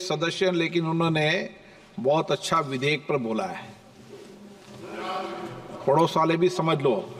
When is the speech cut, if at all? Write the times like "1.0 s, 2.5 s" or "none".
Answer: none